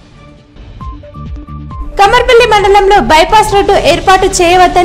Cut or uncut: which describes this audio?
cut